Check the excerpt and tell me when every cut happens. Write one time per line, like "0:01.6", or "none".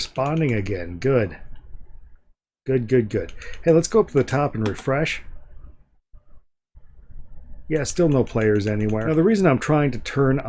0:09.1